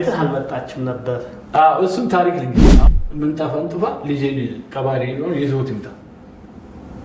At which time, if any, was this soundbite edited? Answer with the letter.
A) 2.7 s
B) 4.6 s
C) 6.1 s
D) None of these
A